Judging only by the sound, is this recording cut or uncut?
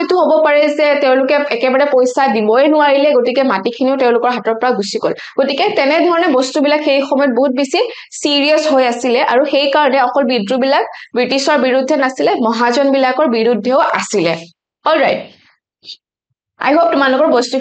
uncut